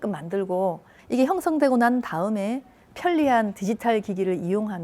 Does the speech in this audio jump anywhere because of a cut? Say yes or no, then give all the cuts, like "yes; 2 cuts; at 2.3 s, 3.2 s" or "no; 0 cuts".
yes; 1 cut; at 0.9 s